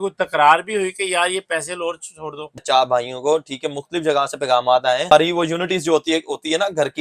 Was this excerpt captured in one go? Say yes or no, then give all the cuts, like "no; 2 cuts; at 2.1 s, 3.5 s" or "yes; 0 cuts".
no; 2 cuts; at 2.6 s, 5.1 s